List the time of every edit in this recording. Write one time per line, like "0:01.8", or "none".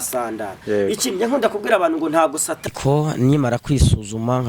0:02.7

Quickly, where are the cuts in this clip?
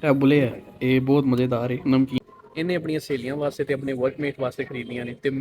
0:02.2

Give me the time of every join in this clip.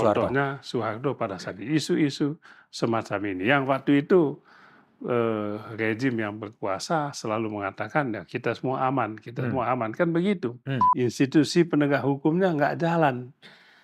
0:10.8

